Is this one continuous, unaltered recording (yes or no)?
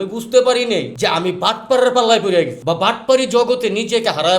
no